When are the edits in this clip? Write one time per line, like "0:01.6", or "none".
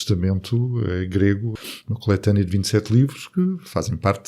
0:01.5